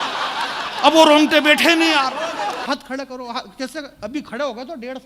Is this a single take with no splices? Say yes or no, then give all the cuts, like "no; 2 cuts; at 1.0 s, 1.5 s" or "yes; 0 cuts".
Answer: no; 1 cut; at 2.6 s